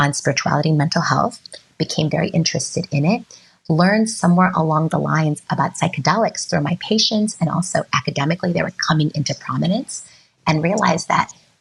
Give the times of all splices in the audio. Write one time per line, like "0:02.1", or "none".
none

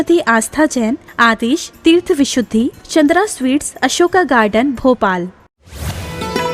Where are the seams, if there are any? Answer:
0:05.6

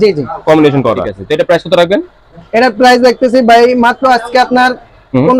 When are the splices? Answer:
0:01.1

